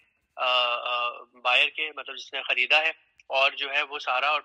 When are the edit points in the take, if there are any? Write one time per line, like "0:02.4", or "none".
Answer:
none